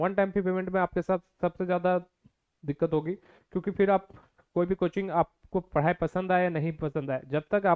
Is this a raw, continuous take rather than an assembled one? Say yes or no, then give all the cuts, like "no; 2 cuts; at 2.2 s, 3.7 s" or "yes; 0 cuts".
yes; 0 cuts